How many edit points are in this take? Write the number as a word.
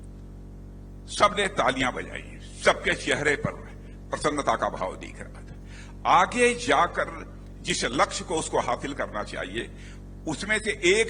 one